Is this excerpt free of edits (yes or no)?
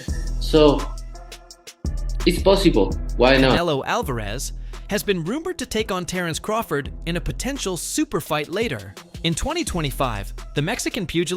no